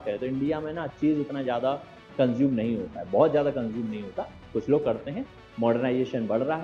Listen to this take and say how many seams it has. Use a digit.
0